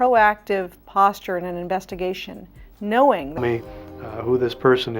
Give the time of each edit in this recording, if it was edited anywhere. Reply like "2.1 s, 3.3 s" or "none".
3.4 s